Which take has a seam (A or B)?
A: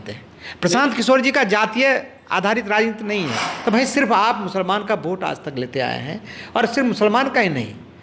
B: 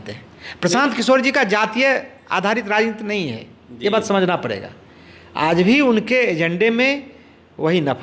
A